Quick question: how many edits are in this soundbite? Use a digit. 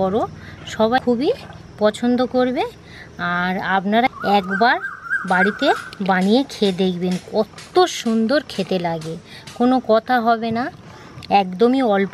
2